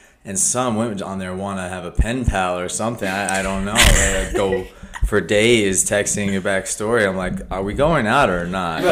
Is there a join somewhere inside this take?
no; 0 cuts

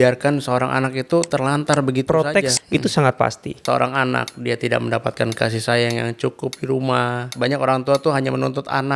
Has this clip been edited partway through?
yes; 3 cuts; at 2.6 s, 3.6 s, 7.3 s

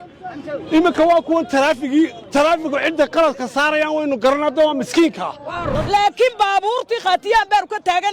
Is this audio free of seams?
no; 1 cut; at 5.7 s

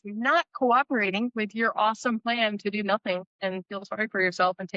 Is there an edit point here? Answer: no; 0 cuts

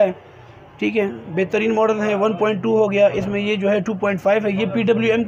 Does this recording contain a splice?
no; 0 cuts

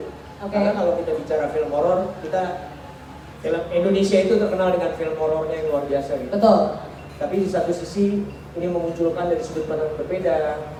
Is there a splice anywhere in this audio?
no; 0 cuts

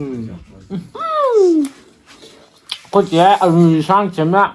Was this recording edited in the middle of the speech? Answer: yes; 1 cut; at 0.9 s

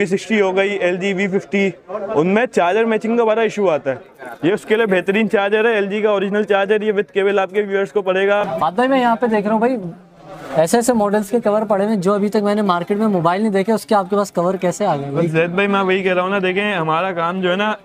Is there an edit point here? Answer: yes; 1 cut; at 8.5 s

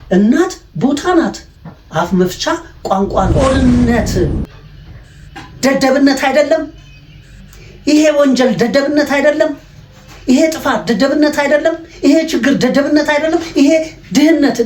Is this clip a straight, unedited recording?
no; 1 cut; at 3.3 s

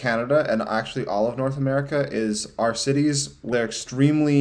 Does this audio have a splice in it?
yes; 1 cut; at 3.5 s

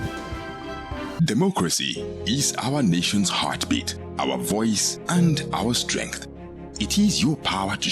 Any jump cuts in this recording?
yes; 1 cut; at 1.2 s

